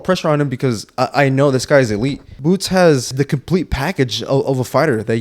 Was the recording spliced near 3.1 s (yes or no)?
yes